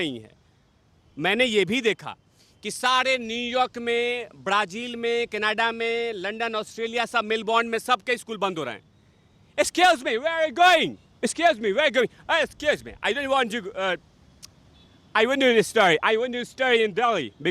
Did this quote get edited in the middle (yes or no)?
no